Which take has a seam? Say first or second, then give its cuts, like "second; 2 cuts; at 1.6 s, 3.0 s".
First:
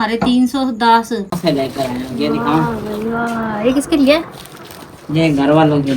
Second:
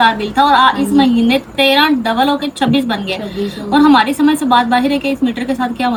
first; 1 cut; at 1.4 s